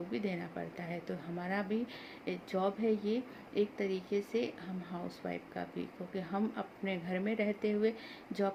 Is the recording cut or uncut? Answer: uncut